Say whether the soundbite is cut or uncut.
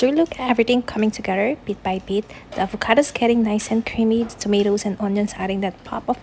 uncut